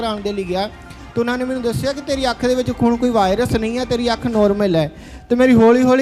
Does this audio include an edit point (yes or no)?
no